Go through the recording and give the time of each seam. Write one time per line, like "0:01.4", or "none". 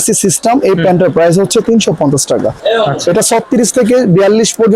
0:02.5